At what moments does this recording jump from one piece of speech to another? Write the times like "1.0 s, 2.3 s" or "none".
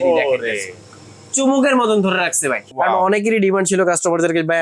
2.6 s